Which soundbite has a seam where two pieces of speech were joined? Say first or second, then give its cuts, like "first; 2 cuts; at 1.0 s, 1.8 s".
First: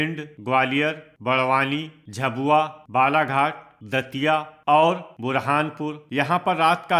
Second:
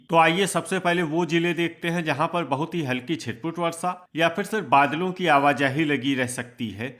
first; 5 cuts; at 1.1 s, 2.4 s, 3.7 s, 5.1 s, 6.0 s